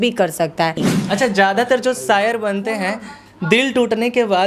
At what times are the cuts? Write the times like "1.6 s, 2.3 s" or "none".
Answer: 0.9 s